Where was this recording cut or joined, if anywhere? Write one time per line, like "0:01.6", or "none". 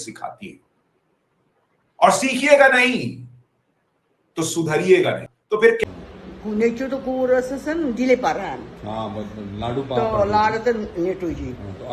0:06.0